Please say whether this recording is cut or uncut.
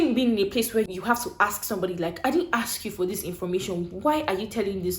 cut